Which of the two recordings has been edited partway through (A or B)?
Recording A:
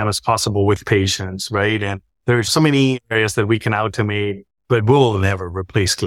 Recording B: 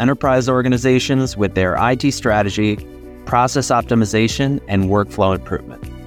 A